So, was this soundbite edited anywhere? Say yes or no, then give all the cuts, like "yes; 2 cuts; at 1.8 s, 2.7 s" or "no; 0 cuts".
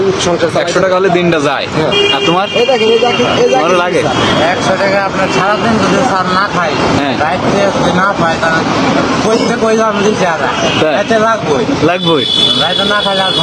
no; 0 cuts